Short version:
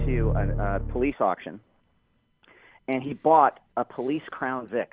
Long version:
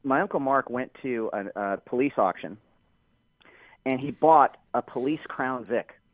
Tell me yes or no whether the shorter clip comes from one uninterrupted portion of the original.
yes